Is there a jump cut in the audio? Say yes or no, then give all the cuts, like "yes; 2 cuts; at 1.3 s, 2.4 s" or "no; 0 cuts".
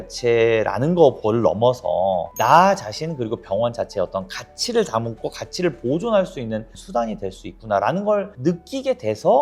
no; 0 cuts